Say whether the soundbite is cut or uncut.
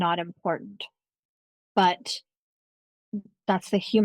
uncut